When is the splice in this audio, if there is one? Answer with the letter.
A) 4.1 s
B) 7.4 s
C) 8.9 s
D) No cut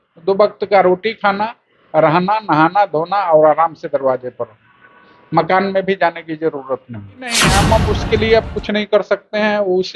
B